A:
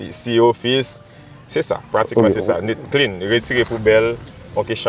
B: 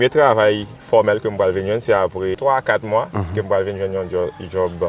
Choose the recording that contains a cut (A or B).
B